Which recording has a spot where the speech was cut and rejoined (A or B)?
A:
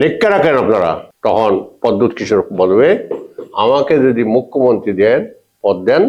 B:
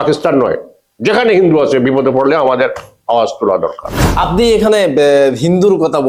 A